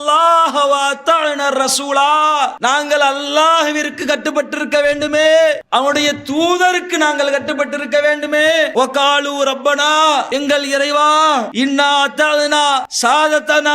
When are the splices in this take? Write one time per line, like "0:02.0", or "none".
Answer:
0:05.6

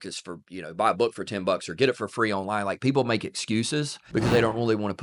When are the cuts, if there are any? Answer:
0:04.0

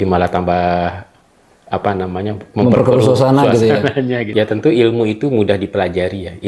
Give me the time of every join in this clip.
0:04.2

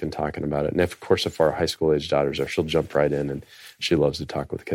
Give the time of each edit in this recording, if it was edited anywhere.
none

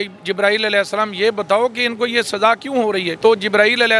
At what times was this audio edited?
0:03.1

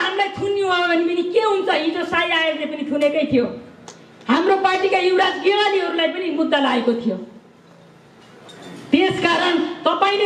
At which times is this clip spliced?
none

